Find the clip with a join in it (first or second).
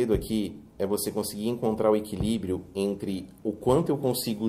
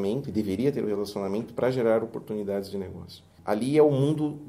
second